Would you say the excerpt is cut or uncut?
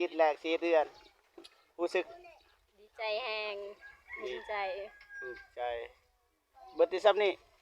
uncut